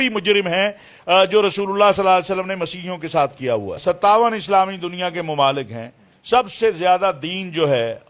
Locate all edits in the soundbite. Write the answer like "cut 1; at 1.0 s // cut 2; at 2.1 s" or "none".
cut 1; at 3.8 s